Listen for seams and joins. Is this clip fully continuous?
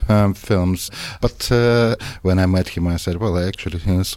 no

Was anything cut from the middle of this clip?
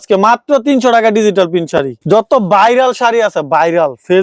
no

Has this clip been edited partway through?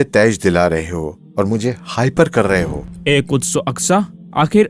yes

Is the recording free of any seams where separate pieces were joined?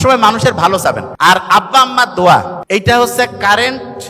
no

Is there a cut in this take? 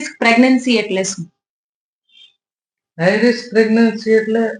no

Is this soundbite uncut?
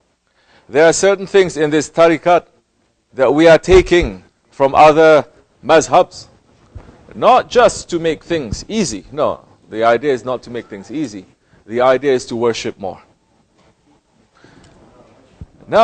no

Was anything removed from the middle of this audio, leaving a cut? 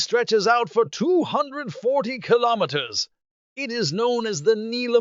yes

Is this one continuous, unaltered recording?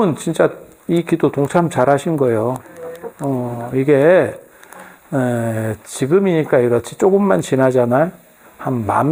yes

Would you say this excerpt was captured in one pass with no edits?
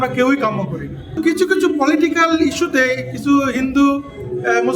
no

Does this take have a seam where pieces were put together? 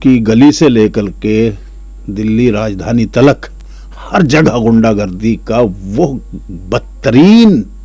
no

